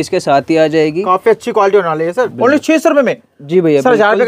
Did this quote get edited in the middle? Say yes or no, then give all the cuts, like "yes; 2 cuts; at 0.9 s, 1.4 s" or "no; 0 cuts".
yes; 1 cut; at 2.3 s